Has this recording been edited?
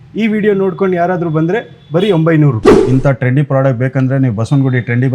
yes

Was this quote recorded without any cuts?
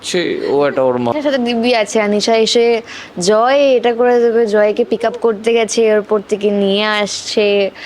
no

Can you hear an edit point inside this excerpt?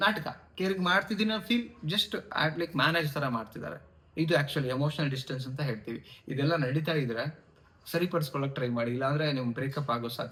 no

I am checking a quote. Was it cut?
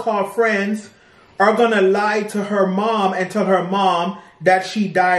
no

